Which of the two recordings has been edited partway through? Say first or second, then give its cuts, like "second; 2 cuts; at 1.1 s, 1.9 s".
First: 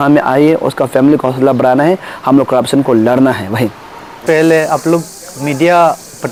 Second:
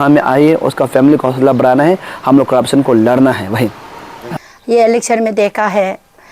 second; 1 cut; at 4.1 s